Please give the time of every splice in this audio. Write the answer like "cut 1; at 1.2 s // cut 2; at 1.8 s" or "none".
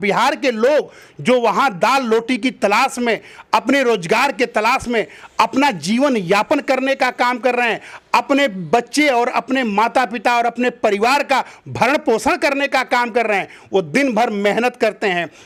none